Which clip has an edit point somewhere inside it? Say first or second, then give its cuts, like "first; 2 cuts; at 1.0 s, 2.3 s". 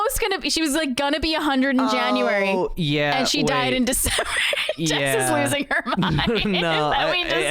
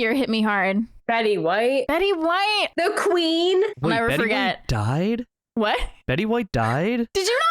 second; 4 cuts; at 1.0 s, 1.9 s, 2.7 s, 3.8 s